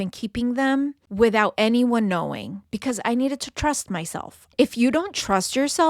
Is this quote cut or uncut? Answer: cut